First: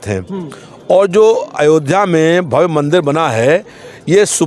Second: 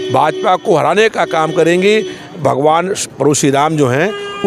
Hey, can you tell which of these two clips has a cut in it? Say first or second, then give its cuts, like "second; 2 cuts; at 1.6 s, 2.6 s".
second; 1 cut; at 2.4 s